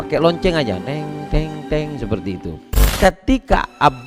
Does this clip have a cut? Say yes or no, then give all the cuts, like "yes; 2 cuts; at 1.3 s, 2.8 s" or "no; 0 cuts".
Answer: yes; 1 cut; at 2.8 s